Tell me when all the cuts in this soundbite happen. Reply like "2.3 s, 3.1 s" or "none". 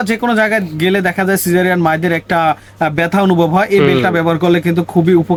none